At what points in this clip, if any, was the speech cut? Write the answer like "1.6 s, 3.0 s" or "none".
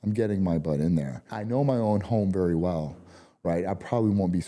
1.3 s

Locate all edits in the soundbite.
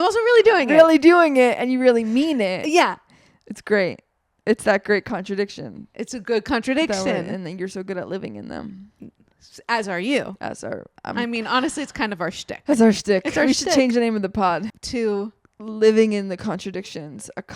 14.8 s

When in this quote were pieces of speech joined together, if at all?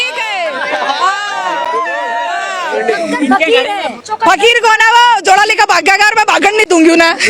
4.0 s

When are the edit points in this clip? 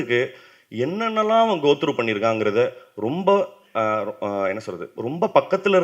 none

